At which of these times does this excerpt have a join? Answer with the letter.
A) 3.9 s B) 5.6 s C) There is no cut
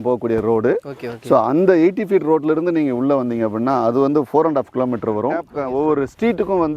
B